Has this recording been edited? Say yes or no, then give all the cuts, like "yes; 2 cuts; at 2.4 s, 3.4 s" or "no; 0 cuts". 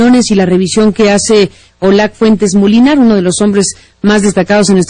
yes; 1 cut; at 3.5 s